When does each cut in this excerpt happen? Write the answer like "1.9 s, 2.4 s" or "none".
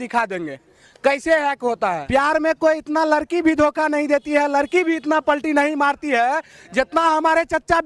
2.0 s